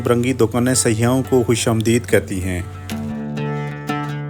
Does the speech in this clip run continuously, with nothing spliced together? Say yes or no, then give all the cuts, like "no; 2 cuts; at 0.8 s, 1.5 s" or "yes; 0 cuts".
yes; 0 cuts